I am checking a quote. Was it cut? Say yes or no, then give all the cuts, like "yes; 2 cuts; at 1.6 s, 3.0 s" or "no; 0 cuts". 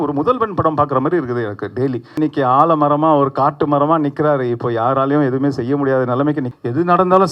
yes; 2 cuts; at 2.2 s, 6.5 s